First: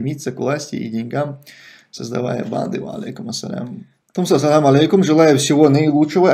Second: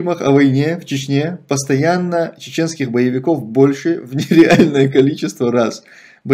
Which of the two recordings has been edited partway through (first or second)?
first